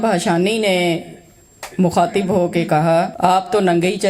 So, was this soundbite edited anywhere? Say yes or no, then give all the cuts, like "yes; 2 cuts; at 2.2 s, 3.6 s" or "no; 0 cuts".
yes; 1 cut; at 3.1 s